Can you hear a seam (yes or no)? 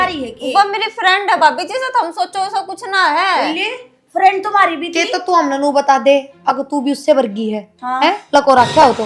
no